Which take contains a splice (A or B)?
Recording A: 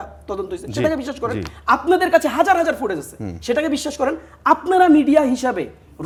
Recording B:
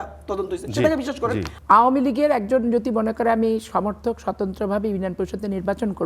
B